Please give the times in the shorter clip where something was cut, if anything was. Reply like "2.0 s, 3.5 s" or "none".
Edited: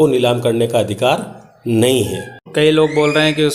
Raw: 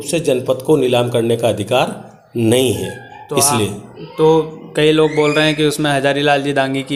2.4 s